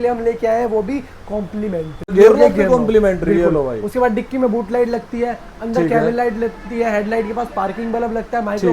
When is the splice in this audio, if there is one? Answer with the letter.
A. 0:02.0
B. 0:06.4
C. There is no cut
A